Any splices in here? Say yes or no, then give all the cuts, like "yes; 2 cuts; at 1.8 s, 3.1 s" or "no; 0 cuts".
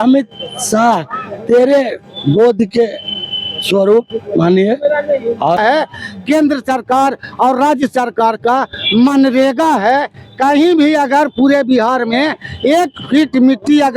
yes; 1 cut; at 5.6 s